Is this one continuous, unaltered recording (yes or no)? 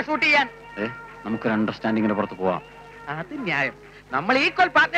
yes